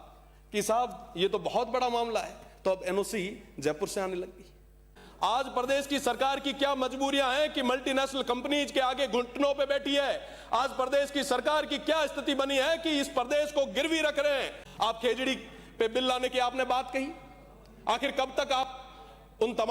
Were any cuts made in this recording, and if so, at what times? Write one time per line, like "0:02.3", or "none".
0:05.0
0:14.6